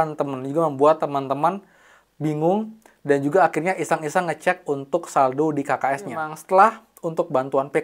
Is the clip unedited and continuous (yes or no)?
no